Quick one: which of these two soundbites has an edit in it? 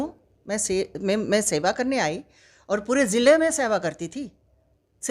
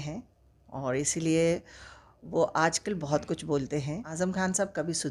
second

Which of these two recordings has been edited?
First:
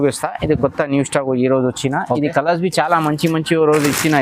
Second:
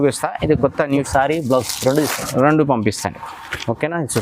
second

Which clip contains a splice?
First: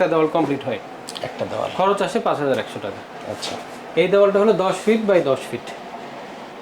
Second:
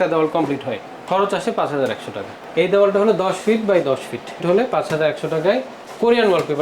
second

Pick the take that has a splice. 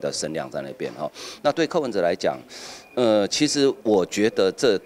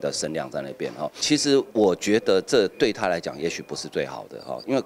second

